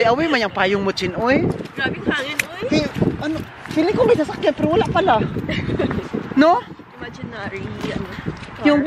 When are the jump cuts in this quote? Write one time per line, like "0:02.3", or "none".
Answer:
none